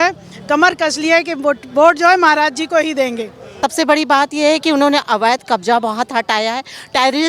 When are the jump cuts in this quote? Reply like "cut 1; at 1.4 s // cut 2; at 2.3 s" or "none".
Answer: cut 1; at 3.6 s